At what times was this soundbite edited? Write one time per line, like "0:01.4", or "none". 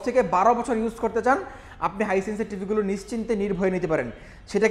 none